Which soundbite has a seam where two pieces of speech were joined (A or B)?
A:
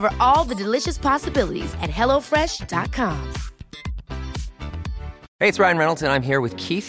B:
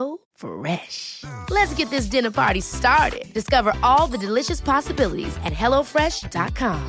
A